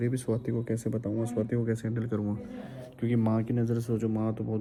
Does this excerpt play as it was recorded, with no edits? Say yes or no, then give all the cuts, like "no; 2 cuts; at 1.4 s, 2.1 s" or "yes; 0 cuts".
yes; 0 cuts